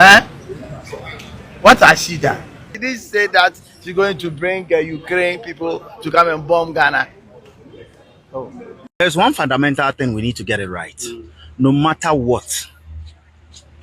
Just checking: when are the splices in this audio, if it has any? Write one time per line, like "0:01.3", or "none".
0:02.8
0:09.0